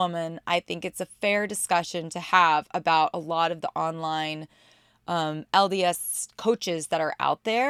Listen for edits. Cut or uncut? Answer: uncut